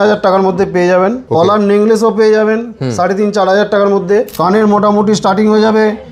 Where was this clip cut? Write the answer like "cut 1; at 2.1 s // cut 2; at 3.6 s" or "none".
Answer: cut 1; at 1.2 s // cut 2; at 4.3 s